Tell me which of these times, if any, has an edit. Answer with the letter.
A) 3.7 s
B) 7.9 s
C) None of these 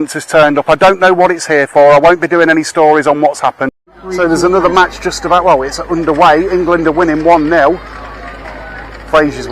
A